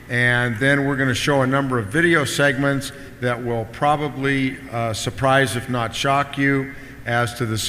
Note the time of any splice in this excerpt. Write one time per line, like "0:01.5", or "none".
0:02.9